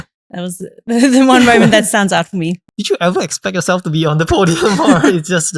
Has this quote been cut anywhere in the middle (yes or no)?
yes